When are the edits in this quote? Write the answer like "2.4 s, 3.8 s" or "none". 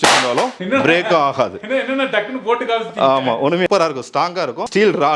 3.7 s